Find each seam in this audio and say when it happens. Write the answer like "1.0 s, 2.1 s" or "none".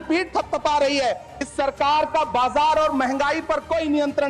1.5 s